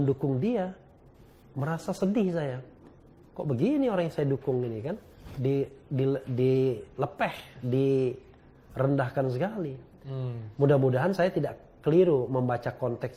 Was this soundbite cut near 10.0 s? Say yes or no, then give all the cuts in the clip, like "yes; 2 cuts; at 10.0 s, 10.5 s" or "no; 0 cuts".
no; 0 cuts